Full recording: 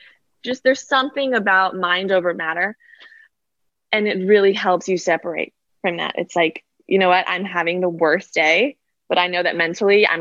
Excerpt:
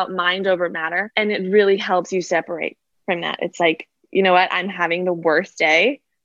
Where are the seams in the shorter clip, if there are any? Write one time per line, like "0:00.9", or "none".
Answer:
0:01.1